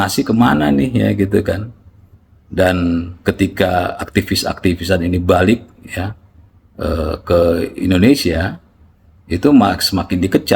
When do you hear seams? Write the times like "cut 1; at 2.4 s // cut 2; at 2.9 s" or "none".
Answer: none